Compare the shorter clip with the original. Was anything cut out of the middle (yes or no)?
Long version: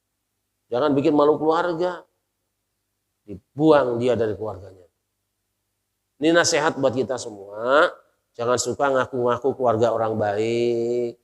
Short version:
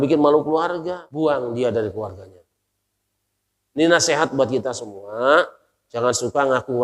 yes